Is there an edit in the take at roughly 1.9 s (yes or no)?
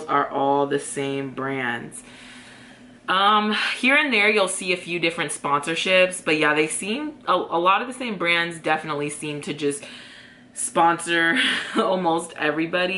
no